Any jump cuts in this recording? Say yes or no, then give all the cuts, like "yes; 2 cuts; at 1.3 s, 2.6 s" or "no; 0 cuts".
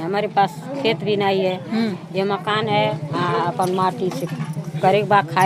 no; 0 cuts